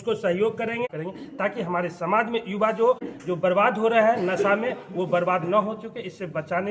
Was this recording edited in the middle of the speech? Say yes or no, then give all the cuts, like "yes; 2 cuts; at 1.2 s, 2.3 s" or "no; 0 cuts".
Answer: yes; 2 cuts; at 0.9 s, 3.1 s